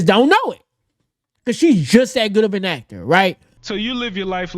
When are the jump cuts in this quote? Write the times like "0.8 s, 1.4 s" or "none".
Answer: 3.6 s